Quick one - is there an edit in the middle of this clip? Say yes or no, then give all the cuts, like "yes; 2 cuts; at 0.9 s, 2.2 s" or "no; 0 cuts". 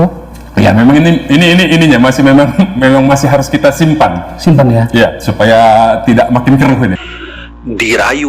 yes; 1 cut; at 7.2 s